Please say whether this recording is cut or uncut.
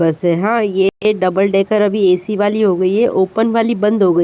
uncut